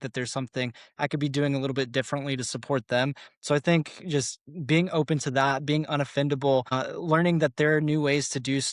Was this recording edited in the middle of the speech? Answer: no; 0 cuts

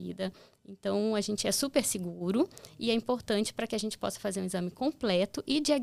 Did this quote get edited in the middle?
no; 0 cuts

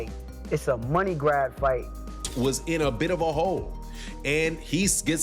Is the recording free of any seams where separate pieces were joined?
no; 1 cut; at 2.3 s

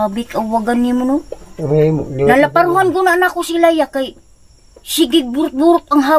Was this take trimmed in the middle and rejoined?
no; 0 cuts

